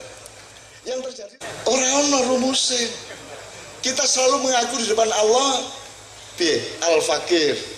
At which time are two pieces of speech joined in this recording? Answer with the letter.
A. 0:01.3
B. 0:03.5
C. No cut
A